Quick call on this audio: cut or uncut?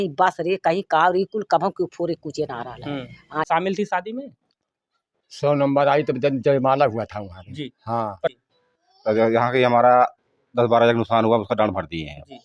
cut